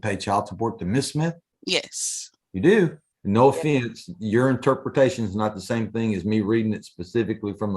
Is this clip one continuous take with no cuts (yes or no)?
no